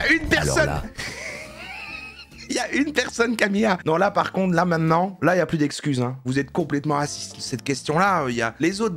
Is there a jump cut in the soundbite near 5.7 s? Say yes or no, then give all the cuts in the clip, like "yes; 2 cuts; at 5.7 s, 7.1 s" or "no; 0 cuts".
no; 2 cuts; at 3.8 s, 7.4 s